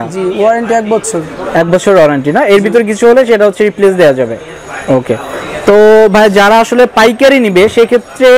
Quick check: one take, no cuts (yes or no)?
yes